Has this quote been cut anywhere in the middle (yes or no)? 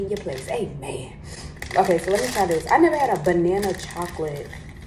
no